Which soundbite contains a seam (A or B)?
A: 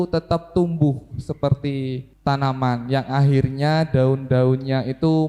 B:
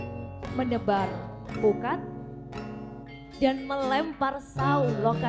A